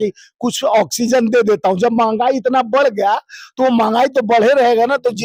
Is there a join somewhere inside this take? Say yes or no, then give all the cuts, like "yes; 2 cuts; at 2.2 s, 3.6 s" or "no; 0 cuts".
no; 0 cuts